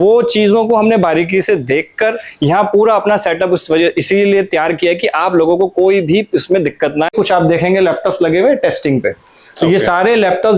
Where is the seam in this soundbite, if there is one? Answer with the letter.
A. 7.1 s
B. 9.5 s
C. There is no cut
A